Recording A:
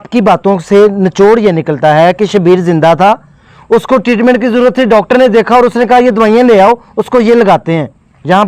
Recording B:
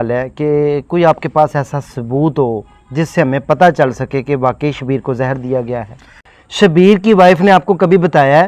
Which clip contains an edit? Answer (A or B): B